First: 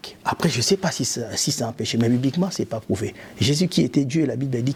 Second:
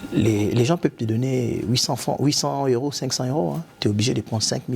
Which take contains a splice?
second; 1 cut; at 3.7 s

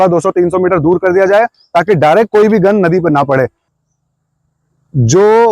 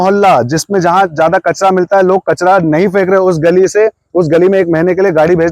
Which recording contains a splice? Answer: first; 1 cut; at 3.6 s

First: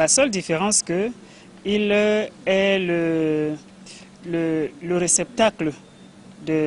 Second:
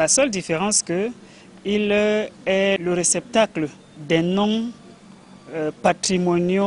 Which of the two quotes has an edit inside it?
second; 2 cuts; at 2.8 s, 4.0 s

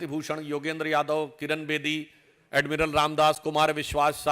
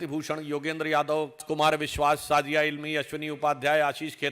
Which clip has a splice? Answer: second; 1 cut; at 1.4 s

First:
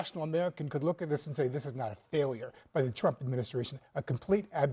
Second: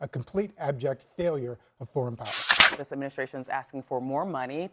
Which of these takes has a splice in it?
second; 1 cut; at 2.6 s

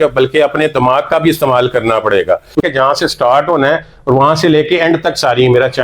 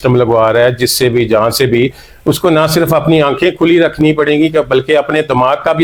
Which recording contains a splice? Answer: first; 1 cut; at 2.6 s

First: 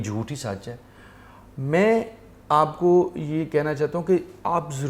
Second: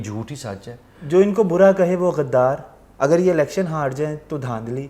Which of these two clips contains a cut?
second; 1 cut; at 1.0 s

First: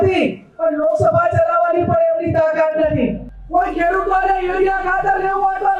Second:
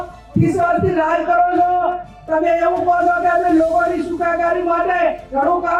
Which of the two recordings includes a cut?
first; 1 cut; at 3.3 s

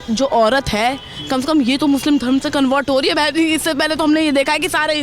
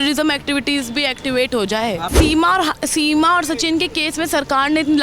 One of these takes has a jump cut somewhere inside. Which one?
second; 1 cut; at 2.1 s

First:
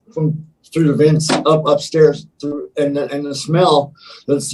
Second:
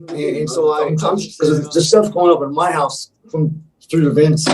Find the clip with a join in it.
second; 1 cut; at 1.0 s

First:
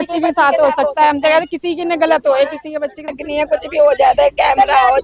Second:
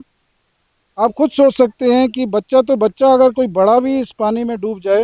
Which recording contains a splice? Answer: first; 1 cut; at 3.2 s

